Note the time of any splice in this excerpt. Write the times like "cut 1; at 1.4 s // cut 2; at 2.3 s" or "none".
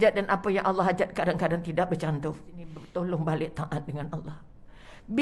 cut 1; at 2.8 s